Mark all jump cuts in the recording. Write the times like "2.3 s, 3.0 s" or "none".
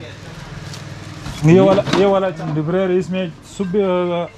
2.3 s